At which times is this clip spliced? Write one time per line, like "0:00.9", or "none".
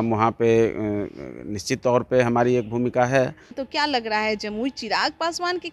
0:03.6